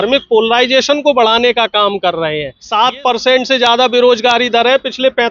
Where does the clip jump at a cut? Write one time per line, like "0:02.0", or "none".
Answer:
0:02.6